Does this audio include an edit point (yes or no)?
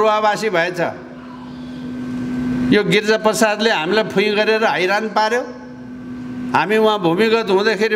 no